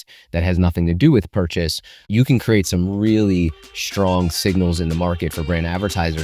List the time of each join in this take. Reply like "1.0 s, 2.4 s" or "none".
2.1 s